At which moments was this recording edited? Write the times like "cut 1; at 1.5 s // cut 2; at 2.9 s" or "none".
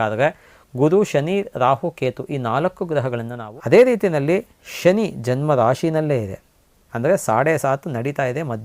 cut 1; at 3.3 s